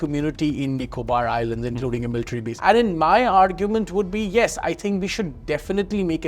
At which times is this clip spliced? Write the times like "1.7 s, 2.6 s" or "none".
2.5 s

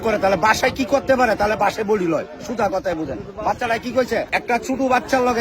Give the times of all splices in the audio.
4.3 s

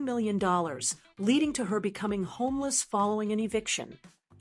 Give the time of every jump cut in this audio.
none

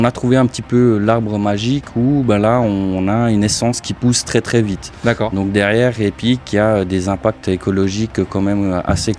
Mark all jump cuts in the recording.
none

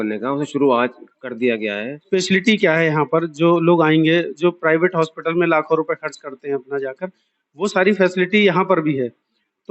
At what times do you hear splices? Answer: 2.1 s

